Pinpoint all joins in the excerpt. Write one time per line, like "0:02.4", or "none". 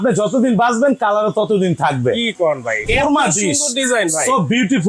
0:02.9